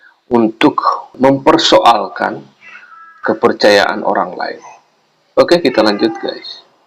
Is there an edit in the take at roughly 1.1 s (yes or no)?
yes